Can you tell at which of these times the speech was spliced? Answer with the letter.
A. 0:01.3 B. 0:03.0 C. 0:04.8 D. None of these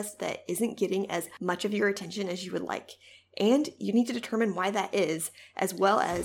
A